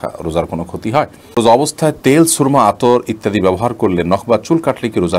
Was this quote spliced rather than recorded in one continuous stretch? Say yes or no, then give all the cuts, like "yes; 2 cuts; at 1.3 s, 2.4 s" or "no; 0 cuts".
yes; 1 cut; at 1.4 s